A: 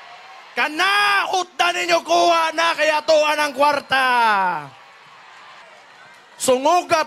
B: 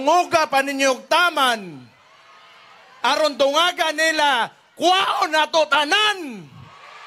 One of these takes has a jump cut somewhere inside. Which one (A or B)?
A